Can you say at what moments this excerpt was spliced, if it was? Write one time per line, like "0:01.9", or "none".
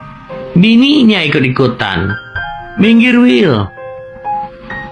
none